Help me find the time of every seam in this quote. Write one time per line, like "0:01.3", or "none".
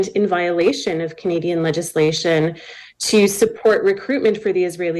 none